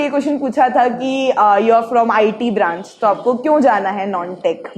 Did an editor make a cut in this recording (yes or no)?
no